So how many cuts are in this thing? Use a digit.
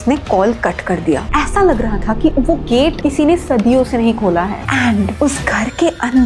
2